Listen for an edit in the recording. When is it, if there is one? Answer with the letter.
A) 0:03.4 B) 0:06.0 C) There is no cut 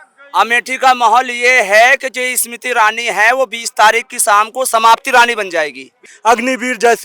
B